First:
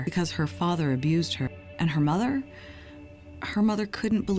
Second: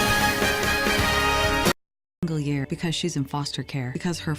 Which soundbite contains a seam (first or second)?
second